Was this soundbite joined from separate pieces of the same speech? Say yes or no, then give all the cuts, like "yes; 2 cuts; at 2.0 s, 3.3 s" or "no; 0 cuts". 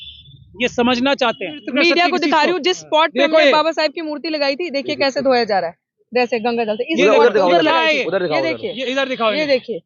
yes; 1 cut; at 1.6 s